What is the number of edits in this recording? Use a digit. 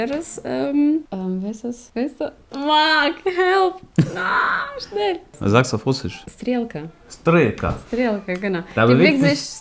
1